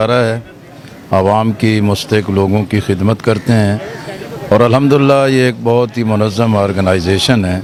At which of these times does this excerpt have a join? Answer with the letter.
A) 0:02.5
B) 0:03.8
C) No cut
C